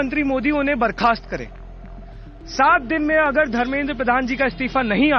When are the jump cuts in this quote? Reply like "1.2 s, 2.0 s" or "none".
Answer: none